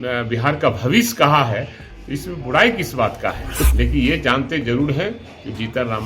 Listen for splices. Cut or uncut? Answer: cut